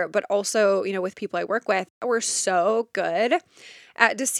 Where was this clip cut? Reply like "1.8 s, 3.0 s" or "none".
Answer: 1.9 s